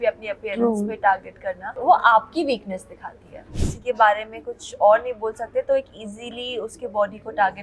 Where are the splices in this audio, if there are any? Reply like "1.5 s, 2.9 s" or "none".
1.7 s, 3.7 s